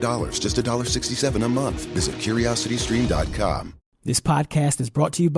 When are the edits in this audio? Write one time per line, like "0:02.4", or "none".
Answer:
0:03.7